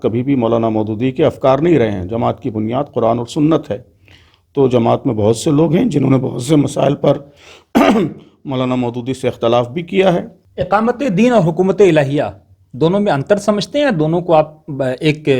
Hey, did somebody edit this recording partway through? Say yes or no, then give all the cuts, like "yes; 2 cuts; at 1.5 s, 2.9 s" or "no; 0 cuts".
yes; 1 cut; at 10.4 s